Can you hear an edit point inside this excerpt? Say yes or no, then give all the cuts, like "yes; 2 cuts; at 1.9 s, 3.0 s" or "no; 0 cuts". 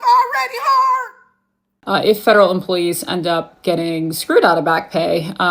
yes; 1 cut; at 2.1 s